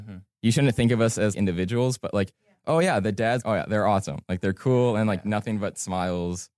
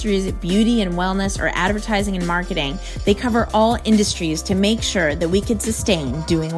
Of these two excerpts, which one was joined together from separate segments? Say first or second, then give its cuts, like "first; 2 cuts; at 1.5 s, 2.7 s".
first; 2 cuts; at 1.3 s, 3.4 s